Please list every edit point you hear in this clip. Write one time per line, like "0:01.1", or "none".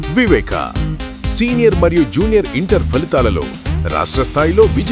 none